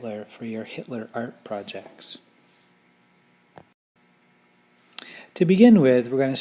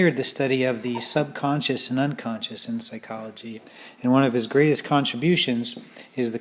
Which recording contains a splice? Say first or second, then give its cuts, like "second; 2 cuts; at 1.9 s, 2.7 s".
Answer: second; 1 cut; at 1.7 s